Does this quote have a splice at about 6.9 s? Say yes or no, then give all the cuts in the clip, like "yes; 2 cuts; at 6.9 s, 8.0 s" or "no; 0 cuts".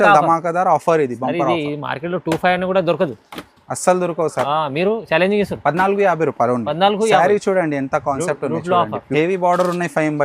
no; 1 cut; at 9.0 s